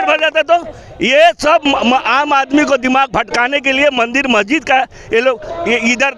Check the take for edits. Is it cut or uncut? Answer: uncut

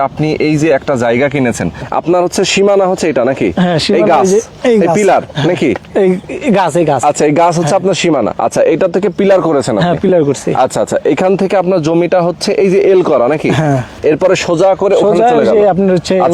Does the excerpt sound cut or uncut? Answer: cut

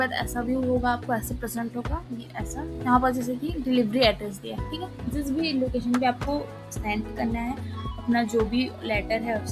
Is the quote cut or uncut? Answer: cut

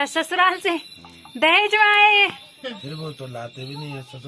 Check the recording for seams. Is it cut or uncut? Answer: uncut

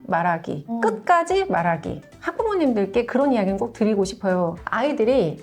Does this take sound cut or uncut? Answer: cut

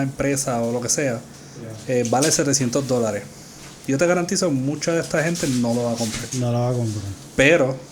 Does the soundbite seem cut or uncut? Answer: uncut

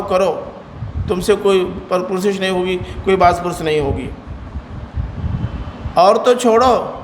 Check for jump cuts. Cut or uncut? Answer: uncut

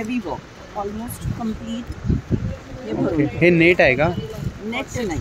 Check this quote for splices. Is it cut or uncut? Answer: uncut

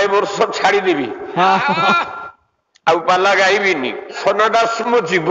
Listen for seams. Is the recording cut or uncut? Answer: cut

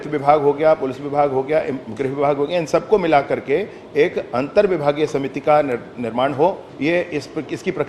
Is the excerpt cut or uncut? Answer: cut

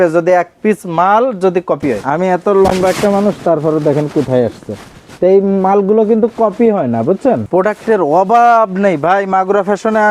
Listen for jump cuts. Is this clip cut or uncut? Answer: cut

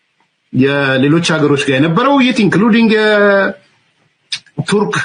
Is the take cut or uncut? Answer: uncut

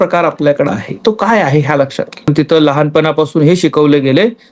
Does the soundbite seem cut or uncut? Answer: cut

